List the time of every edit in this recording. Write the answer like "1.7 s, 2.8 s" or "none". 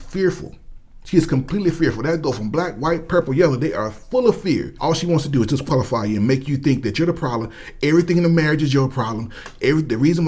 4.7 s